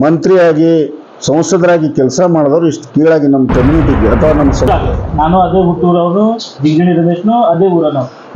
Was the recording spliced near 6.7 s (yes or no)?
no